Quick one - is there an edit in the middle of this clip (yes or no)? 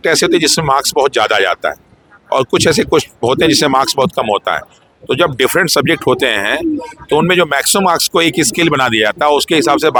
no